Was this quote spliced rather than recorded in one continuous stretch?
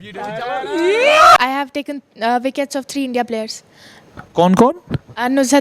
yes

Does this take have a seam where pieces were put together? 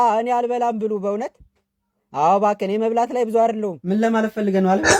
no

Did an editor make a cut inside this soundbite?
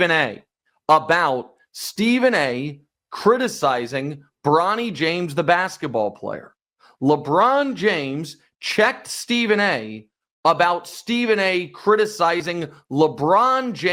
no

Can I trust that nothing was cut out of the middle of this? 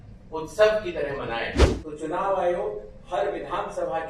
no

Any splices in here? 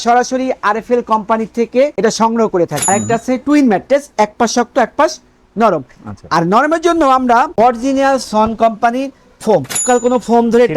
yes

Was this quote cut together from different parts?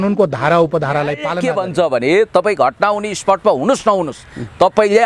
yes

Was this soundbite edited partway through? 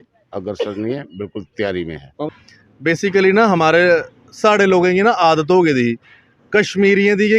yes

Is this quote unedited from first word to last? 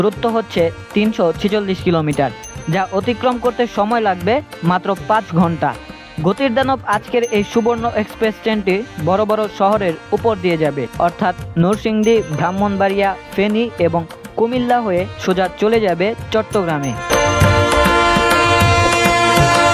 yes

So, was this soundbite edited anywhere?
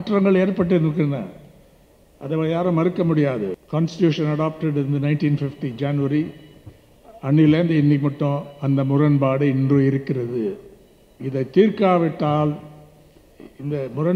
yes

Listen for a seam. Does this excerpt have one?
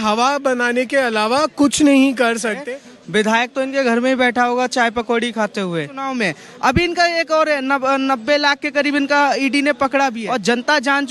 yes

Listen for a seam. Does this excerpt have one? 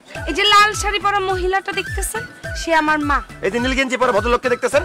no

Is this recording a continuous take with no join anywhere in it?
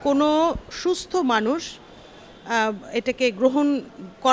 yes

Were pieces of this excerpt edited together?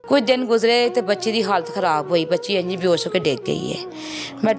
no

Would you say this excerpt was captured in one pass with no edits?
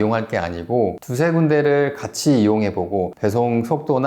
no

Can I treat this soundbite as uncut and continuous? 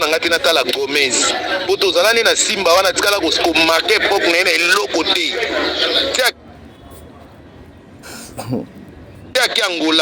yes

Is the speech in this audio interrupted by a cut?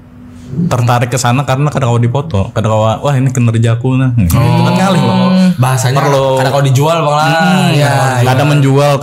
no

